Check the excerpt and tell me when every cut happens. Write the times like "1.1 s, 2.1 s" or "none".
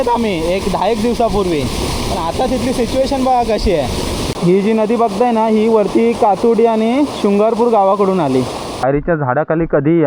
4.3 s, 8.8 s